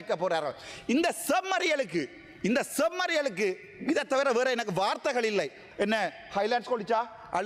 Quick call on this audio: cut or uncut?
cut